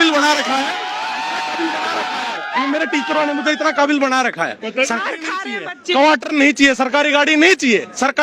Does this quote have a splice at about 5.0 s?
yes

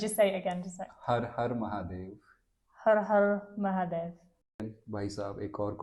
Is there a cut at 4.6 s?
yes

